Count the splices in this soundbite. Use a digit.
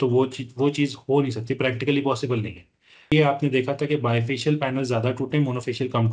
1